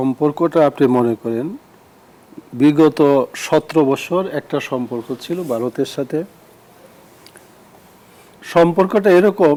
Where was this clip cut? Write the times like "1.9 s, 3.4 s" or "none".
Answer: none